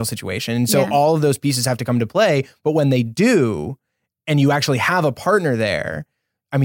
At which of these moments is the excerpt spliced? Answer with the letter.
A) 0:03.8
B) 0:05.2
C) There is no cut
C